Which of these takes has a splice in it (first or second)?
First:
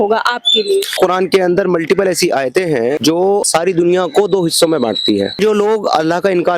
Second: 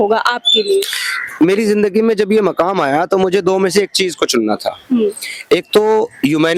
first